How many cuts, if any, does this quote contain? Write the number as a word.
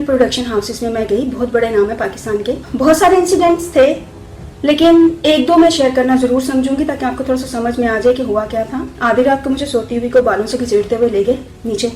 two